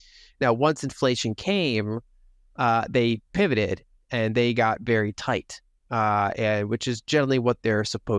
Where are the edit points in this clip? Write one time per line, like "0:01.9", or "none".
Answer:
none